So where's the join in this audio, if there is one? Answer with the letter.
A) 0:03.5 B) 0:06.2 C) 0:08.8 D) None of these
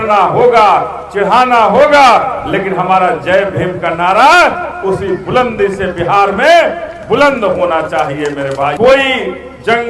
C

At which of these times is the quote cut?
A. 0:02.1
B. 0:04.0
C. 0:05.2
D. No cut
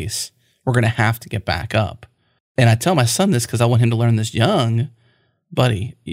A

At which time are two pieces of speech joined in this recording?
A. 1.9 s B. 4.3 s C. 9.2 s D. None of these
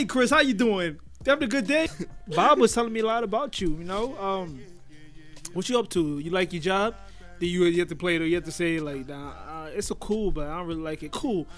A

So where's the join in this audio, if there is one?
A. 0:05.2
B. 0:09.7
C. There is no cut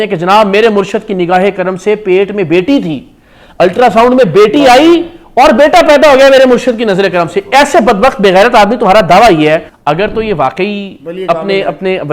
B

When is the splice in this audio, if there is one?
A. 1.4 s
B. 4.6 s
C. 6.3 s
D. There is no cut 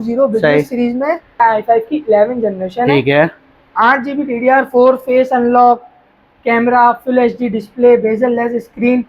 A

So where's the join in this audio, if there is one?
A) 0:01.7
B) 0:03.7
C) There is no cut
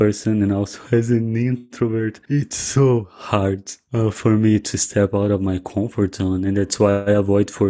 C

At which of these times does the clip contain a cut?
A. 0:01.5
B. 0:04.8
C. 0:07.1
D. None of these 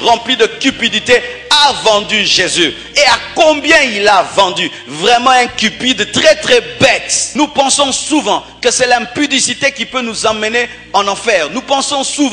C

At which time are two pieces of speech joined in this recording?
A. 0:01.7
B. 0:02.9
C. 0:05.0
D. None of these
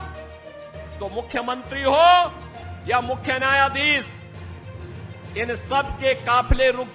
D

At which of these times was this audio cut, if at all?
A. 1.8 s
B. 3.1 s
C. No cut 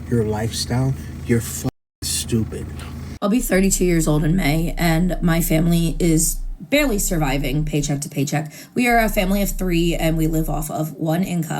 B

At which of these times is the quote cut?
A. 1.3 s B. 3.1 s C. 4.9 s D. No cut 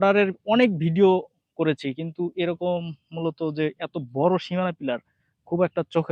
D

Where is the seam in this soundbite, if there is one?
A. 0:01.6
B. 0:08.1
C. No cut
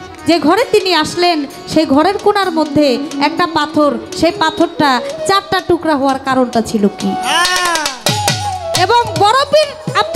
C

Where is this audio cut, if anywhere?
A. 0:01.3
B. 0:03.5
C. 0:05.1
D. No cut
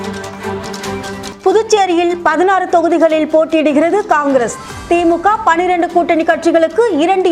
A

